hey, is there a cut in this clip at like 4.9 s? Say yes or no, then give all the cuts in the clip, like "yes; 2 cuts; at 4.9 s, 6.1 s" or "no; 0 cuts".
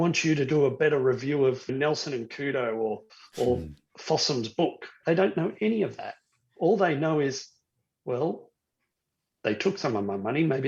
yes; 2 cuts; at 1.7 s, 4.9 s